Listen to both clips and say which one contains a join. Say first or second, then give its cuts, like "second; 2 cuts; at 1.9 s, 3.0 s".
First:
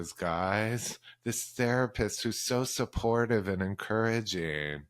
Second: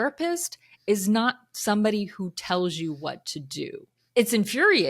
second; 1 cut; at 4.0 s